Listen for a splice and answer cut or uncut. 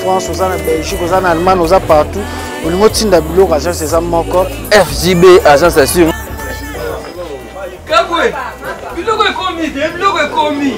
uncut